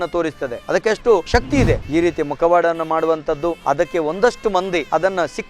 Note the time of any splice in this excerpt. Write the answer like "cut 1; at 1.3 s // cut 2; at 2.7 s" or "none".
cut 1; at 1.8 s